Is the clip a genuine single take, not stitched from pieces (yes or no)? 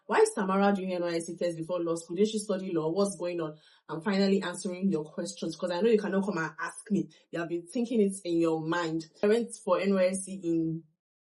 yes